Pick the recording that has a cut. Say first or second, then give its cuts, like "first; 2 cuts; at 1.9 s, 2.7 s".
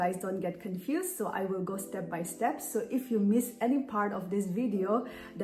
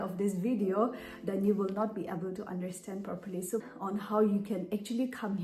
second; 1 cut; at 3.7 s